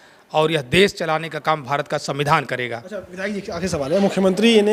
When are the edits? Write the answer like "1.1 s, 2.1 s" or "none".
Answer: none

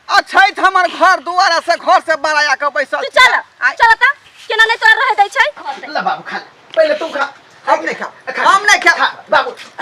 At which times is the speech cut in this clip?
5.8 s

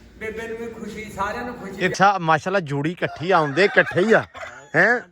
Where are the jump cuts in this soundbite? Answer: 1.9 s

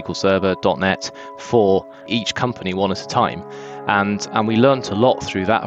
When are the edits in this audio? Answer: 2.0 s

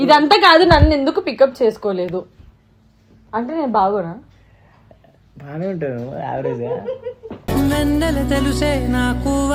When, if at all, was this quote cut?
none

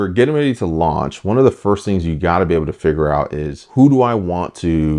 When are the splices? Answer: none

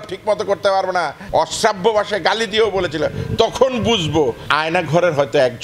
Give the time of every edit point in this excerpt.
1.2 s, 4.4 s

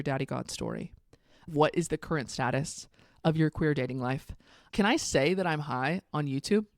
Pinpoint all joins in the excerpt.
1.5 s, 4.6 s

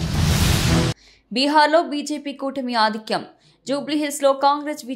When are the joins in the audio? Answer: 1.0 s

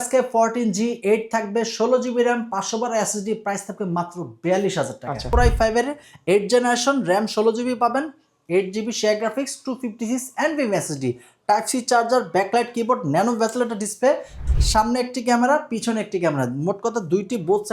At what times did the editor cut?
5.2 s, 14.4 s

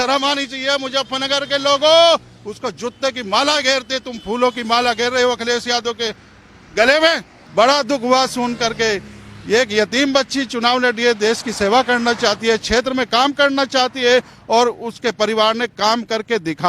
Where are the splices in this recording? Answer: 7.3 s

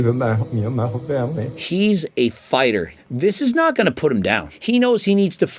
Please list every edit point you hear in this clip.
1.5 s, 2.9 s, 4.5 s

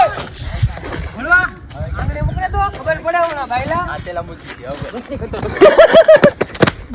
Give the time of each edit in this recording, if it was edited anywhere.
none

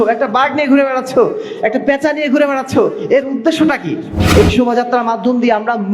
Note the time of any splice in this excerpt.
4.2 s

